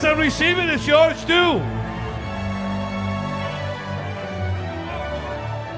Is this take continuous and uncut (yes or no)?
yes